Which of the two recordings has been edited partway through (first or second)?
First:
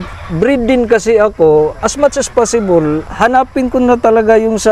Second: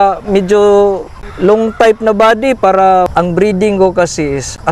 second